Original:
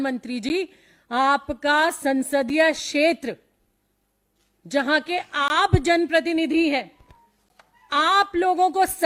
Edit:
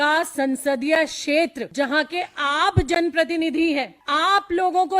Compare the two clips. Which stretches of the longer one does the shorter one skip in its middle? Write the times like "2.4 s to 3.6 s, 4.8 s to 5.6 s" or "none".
3.3 s to 4.6 s, 6.9 s to 7.8 s